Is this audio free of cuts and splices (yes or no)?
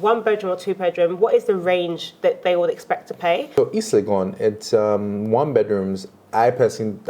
no